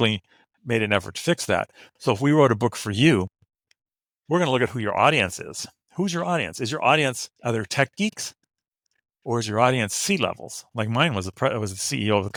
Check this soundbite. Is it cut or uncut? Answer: uncut